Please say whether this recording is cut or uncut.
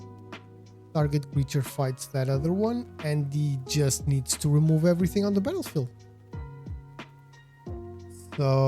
cut